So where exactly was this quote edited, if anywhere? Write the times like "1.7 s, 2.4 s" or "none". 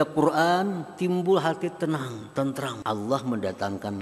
2.8 s